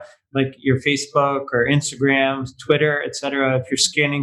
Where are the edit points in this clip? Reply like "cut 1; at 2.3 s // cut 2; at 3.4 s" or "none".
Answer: none